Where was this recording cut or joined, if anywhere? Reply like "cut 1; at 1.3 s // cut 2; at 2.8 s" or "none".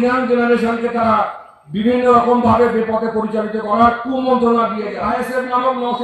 cut 1; at 5.0 s